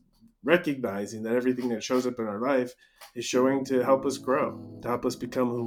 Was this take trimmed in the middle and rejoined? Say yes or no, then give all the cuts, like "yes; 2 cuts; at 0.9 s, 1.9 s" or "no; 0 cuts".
yes; 1 cut; at 4.7 s